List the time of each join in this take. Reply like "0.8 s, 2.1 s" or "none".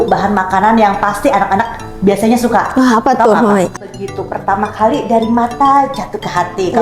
3.8 s